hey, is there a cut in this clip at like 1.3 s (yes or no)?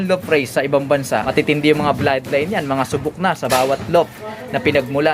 yes